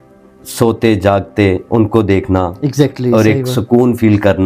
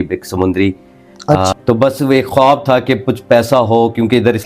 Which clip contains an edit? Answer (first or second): second